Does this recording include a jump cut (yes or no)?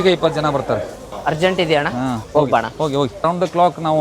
yes